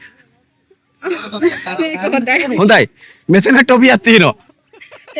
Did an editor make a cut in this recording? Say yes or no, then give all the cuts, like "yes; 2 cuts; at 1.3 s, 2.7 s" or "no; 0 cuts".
no; 0 cuts